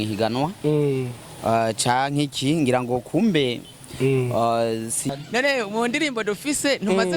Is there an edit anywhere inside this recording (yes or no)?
yes